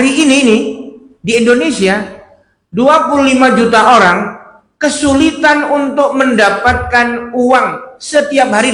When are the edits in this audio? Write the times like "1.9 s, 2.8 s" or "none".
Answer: none

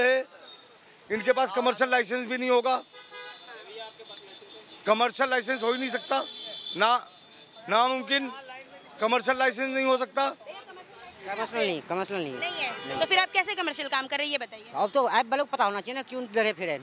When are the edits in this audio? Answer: none

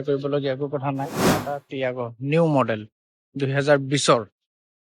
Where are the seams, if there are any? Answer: 1.2 s

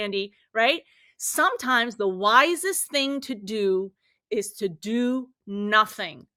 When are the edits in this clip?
none

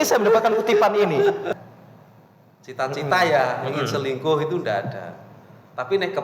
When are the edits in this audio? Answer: 1.5 s

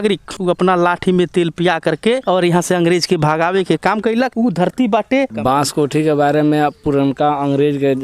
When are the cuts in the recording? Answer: 5.3 s

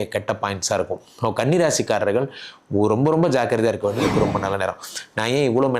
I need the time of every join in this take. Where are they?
4.0 s

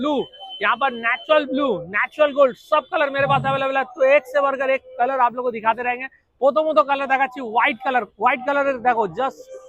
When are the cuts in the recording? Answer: none

